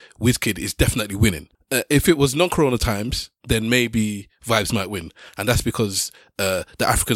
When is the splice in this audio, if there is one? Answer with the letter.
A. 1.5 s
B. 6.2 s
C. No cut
A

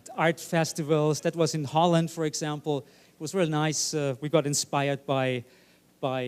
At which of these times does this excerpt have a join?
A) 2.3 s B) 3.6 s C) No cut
B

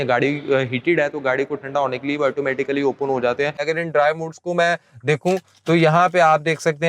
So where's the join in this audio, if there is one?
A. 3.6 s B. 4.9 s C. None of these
A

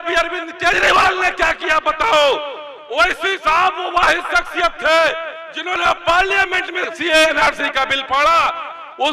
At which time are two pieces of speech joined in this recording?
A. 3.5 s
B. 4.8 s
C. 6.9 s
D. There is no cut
C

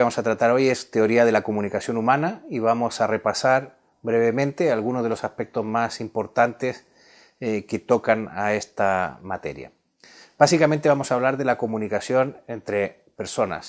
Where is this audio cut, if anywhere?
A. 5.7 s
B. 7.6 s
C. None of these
B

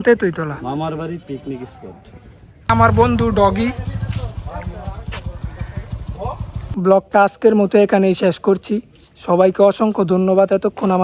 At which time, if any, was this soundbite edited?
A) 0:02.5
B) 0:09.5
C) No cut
C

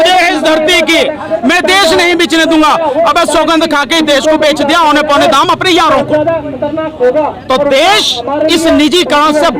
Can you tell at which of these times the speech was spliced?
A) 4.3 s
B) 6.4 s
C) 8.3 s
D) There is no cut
D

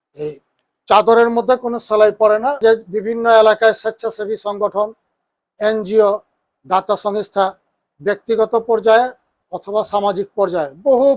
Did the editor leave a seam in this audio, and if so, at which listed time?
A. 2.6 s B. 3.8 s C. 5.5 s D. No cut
A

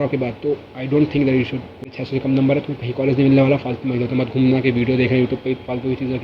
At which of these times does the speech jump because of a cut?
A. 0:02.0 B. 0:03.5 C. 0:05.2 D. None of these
A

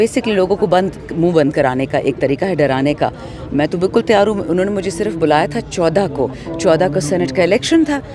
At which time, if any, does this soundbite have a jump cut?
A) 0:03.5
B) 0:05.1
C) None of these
C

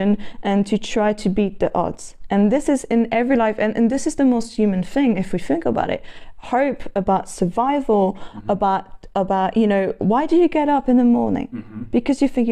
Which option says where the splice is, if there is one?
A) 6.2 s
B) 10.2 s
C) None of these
C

